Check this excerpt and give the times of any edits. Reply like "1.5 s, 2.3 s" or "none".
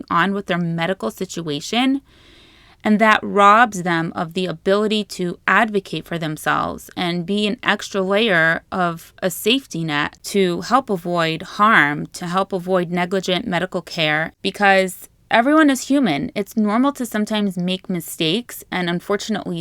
10.2 s, 14.3 s

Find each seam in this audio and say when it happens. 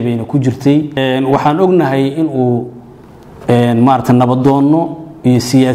1.0 s

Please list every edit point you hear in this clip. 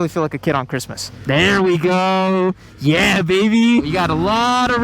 1.0 s, 3.9 s

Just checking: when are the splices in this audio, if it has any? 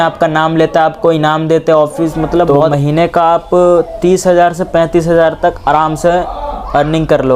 2.6 s

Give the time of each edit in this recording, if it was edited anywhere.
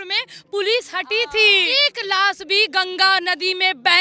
1.7 s

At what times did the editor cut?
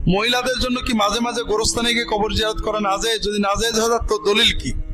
none

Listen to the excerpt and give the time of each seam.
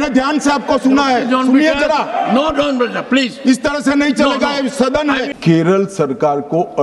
5.3 s

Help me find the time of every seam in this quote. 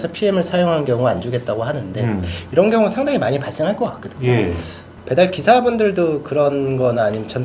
4.9 s

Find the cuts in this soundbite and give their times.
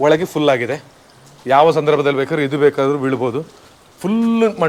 none

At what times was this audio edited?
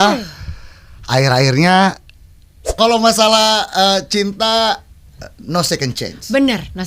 2.8 s

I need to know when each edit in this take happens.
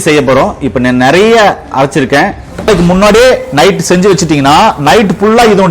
2.7 s

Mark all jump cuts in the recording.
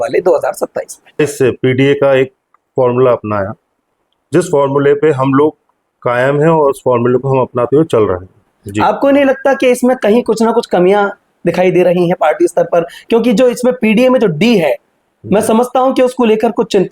1.2 s, 8.6 s

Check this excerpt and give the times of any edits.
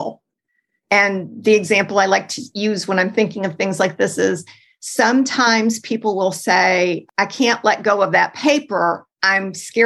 2.4 s, 7.0 s

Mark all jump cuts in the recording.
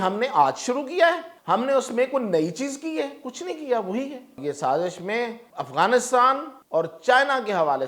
1.3 s, 4.4 s, 5.4 s, 6.5 s

